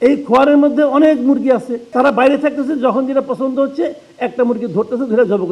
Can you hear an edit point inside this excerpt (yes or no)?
yes